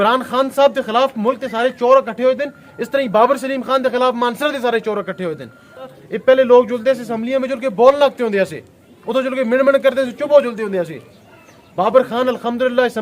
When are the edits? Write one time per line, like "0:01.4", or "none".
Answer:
0:06.0